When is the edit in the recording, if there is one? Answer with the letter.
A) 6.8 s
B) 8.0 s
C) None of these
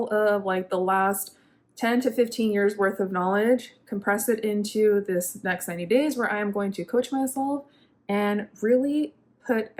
C